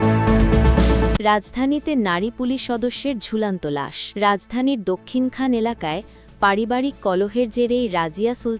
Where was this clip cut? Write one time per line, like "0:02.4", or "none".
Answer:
0:01.2
0:04.0